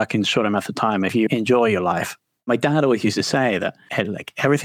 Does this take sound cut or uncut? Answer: cut